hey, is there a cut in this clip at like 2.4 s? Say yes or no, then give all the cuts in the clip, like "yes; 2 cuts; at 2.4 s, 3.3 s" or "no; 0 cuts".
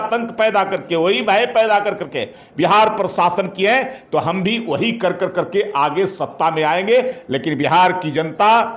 no; 0 cuts